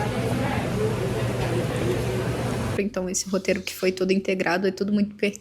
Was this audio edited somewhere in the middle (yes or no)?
yes